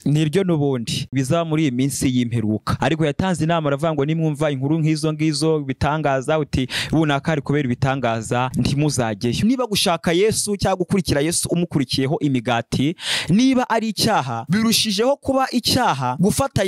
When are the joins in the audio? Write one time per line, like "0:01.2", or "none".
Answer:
0:01.1
0:09.4